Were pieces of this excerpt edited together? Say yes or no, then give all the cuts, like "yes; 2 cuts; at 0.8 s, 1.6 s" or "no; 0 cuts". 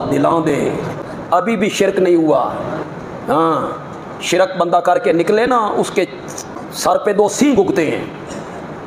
yes; 2 cuts; at 1.0 s, 6.6 s